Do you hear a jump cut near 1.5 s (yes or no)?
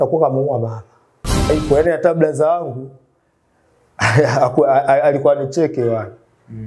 yes